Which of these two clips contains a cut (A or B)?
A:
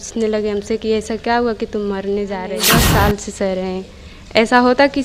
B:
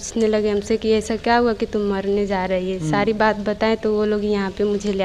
A